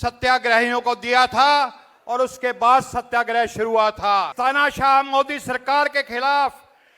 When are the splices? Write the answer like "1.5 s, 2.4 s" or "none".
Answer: 4.3 s